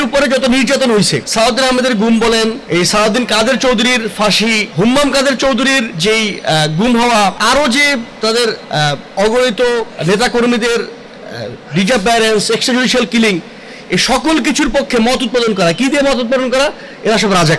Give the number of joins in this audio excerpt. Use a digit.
7